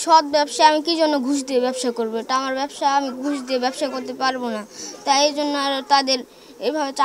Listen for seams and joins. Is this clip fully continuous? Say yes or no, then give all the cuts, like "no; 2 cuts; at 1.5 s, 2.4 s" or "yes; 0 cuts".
yes; 0 cuts